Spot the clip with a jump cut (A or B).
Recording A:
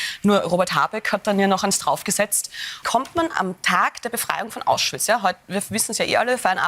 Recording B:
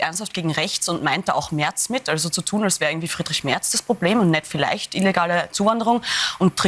A